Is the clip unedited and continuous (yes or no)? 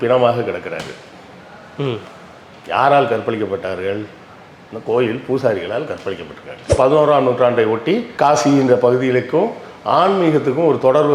no